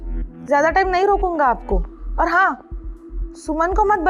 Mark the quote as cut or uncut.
uncut